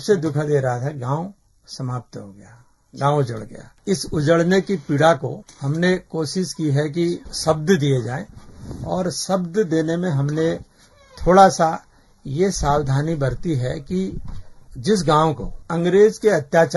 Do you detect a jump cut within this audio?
no; 0 cuts

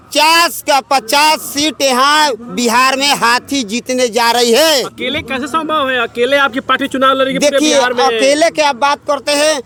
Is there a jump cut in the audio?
no; 0 cuts

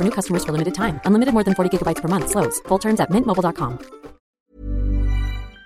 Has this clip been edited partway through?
yes; 1 cut; at 4.4 s

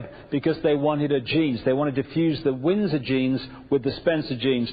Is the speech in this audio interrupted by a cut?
yes; 1 cut; at 3.1 s

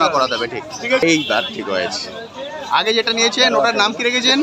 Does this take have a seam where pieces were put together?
yes; 1 cut; at 1.0 s

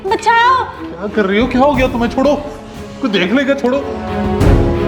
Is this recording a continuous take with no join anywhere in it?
no; 1 cut; at 3.9 s

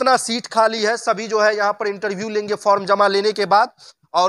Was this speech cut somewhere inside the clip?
no; 0 cuts

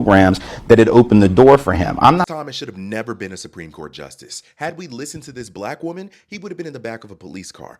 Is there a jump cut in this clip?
yes; 1 cut; at 2.3 s

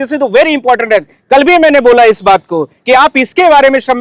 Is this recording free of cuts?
yes; 0 cuts

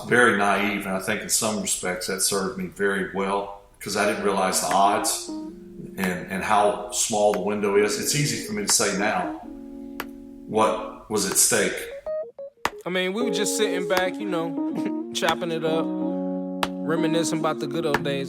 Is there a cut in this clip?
yes; 1 cut; at 11.9 s

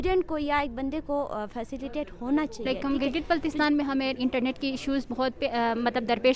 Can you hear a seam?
yes; 1 cut; at 2.7 s

